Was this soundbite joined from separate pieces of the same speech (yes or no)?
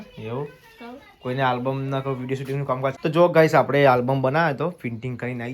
yes